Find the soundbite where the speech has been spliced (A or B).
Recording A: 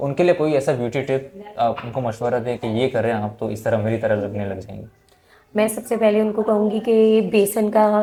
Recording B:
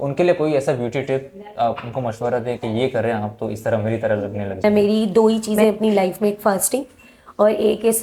B